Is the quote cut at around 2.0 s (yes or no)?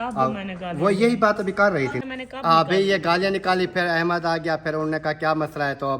yes